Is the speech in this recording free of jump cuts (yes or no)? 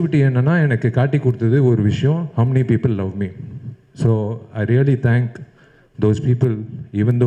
yes